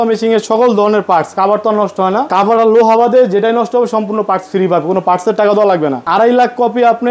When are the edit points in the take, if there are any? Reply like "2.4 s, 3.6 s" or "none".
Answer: 2.3 s, 6.1 s